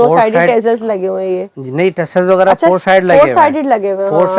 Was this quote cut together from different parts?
no; 0 cuts

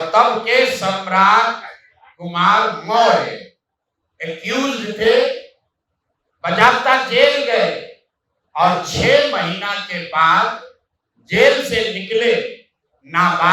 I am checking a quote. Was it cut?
no; 0 cuts

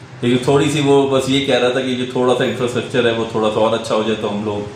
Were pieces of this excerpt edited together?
no; 0 cuts

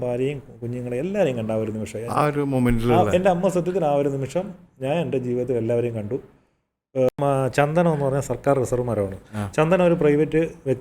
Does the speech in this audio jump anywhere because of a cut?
yes; 1 cut; at 7.1 s

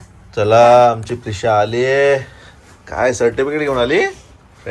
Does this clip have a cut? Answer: no; 0 cuts

